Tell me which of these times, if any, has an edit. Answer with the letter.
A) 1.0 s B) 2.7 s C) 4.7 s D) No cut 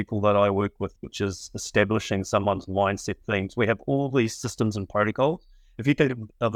D